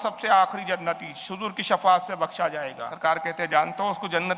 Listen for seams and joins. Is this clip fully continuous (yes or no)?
no